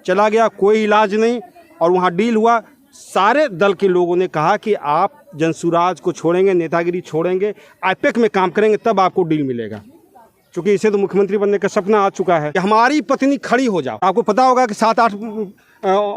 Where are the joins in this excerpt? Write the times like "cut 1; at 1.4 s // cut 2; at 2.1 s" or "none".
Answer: cut 1; at 12.5 s // cut 2; at 13.9 s

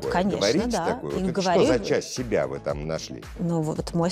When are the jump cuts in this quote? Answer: cut 1; at 2.8 s

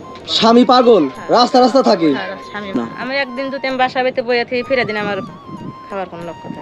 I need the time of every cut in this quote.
cut 1; at 2.7 s

